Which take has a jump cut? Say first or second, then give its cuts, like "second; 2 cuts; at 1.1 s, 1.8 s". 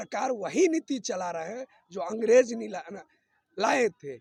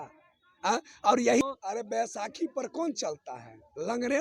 second; 1 cut; at 1.4 s